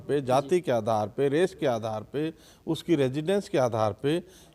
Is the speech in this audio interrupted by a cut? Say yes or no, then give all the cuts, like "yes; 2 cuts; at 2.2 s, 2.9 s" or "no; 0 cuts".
no; 0 cuts